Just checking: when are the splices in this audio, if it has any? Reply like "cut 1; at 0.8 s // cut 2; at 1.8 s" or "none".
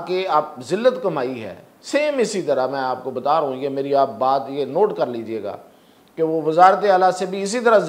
none